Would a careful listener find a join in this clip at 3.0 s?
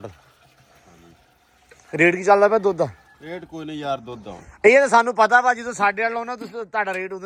no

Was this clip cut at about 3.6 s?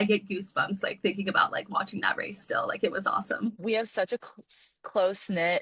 yes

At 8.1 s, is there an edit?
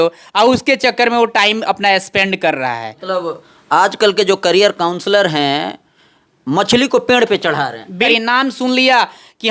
yes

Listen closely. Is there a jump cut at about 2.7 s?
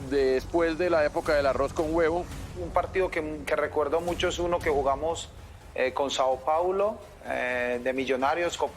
yes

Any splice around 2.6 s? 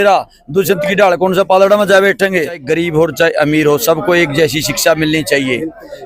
yes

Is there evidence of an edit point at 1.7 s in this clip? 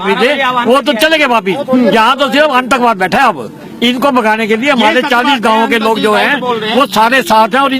no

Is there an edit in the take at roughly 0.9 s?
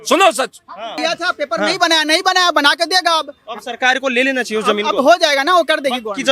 yes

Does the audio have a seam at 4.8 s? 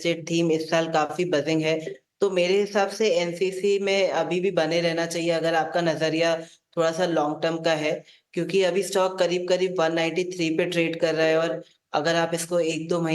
yes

